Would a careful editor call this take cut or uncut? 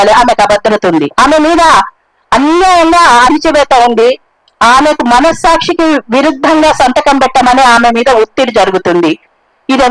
cut